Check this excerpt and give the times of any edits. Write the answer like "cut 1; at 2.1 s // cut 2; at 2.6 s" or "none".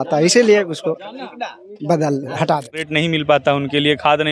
cut 1; at 2.8 s